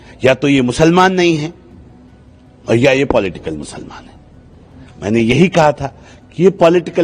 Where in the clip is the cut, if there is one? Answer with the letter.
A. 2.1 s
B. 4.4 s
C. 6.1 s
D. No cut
D